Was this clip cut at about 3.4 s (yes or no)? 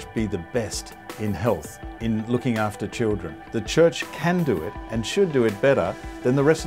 yes